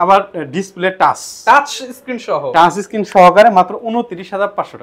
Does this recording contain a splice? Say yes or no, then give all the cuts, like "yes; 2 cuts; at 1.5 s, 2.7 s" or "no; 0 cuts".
no; 0 cuts